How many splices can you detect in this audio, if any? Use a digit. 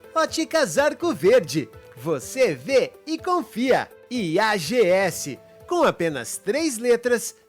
0